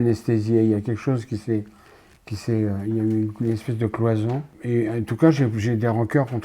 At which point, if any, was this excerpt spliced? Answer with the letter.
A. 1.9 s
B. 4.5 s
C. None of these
B